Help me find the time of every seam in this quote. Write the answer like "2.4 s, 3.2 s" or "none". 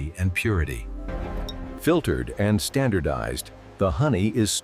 1.2 s